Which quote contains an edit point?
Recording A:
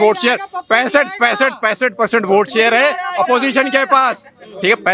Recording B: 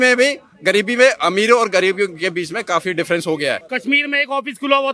B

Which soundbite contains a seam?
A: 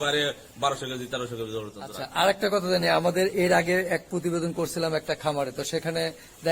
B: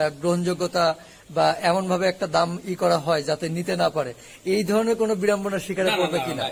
A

